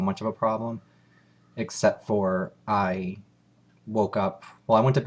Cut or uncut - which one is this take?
uncut